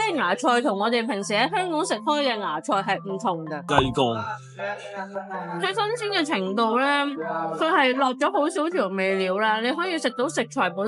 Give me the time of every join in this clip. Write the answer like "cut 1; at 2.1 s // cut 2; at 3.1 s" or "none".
cut 1; at 3.7 s